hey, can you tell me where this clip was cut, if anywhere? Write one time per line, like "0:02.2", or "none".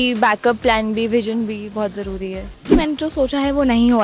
0:02.6